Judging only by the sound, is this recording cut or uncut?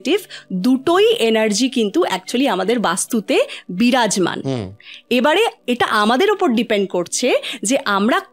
uncut